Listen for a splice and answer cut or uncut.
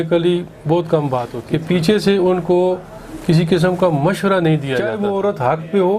cut